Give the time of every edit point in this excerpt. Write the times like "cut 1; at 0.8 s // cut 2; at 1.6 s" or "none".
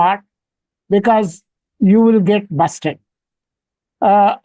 none